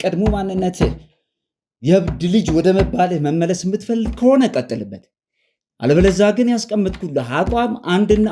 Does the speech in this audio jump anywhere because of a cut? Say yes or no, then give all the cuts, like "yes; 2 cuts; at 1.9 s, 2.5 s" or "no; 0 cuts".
no; 0 cuts